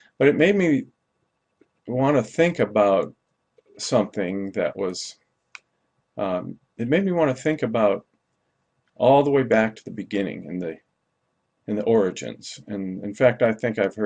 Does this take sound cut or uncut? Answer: uncut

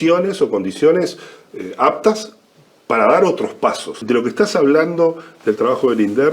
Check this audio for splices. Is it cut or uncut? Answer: cut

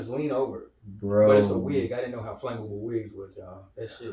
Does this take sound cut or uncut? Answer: uncut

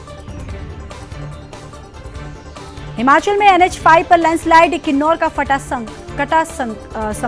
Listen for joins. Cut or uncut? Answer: uncut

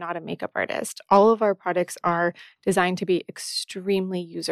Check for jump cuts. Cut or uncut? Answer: uncut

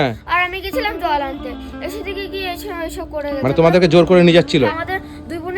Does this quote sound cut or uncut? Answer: cut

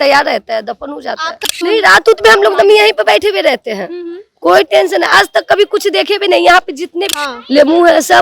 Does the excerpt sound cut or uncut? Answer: cut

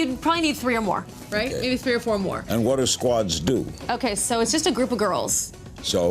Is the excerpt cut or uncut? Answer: uncut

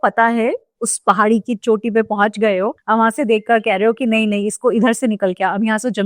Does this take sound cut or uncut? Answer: uncut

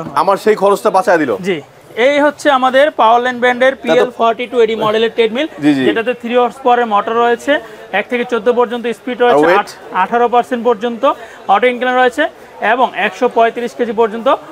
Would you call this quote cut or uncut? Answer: uncut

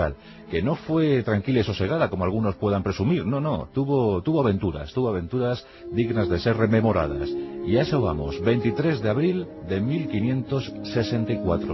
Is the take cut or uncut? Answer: uncut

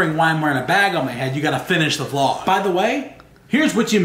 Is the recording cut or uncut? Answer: cut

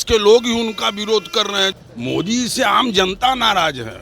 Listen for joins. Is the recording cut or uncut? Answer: cut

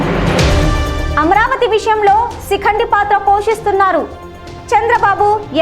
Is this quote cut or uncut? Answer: cut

